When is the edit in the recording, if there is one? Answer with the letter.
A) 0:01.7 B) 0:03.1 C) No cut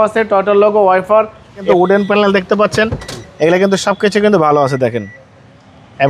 A